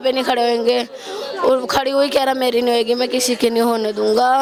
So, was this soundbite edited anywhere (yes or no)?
no